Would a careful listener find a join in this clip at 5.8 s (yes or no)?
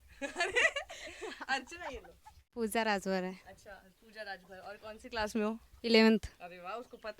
no